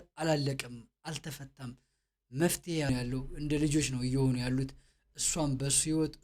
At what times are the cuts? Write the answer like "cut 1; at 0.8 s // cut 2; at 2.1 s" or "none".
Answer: cut 1; at 2.9 s